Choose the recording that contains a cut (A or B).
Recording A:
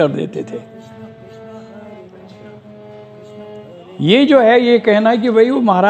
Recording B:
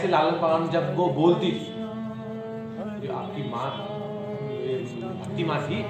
A